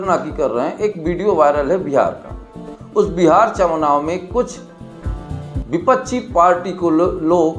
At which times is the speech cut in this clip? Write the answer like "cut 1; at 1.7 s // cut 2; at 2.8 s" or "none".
none